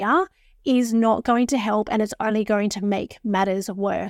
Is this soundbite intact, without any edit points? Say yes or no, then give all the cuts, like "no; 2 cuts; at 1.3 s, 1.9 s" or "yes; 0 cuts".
yes; 0 cuts